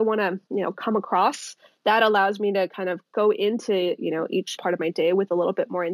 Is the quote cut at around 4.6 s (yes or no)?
yes